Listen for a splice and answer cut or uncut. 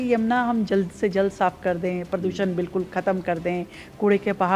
uncut